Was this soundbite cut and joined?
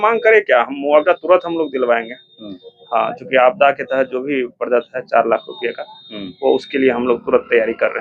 no; 0 cuts

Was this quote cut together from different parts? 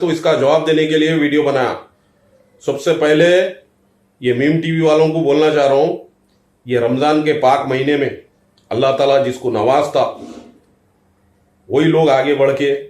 no; 0 cuts

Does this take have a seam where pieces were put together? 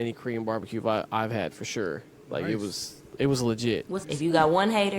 yes; 1 cut; at 4.0 s

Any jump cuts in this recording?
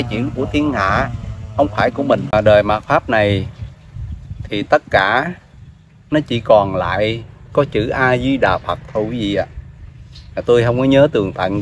yes; 1 cut; at 2.3 s

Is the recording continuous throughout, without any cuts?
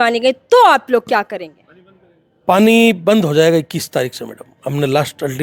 yes; 0 cuts

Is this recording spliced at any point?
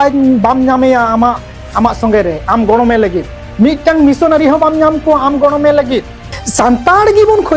yes; 1 cut; at 6.4 s

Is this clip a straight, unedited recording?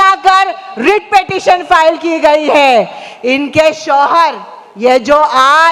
yes; 0 cuts

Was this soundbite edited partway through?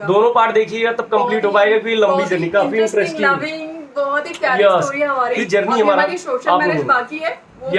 yes; 1 cut; at 5.4 s

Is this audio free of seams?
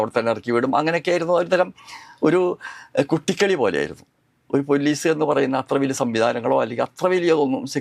yes; 0 cuts

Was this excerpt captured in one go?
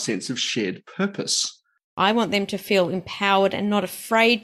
no; 1 cut; at 1.9 s

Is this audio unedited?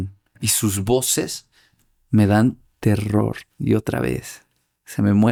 yes; 0 cuts

